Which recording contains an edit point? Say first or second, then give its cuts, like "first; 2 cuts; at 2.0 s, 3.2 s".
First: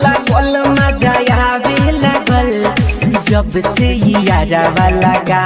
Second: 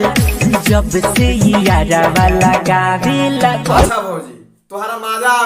second; 1 cut; at 3.8 s